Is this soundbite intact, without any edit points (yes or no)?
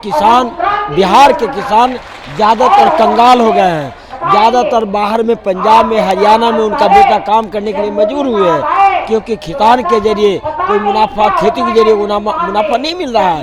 yes